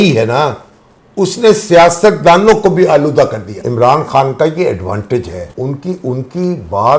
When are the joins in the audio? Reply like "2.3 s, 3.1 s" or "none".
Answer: 3.6 s, 5.4 s